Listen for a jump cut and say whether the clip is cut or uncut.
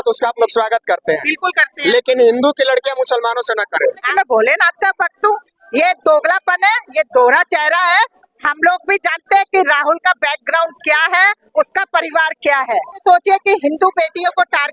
cut